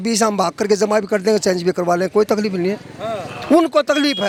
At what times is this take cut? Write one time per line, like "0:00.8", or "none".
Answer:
none